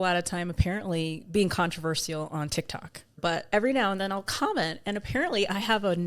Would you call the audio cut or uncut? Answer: cut